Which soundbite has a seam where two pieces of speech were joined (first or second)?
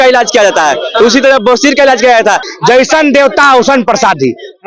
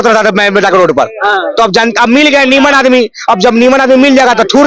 first